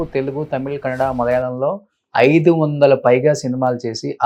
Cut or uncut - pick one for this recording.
uncut